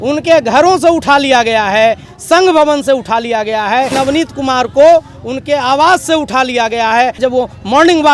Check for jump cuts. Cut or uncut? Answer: cut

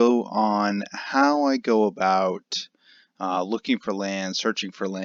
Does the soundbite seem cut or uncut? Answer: uncut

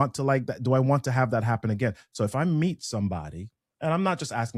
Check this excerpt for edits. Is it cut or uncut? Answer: uncut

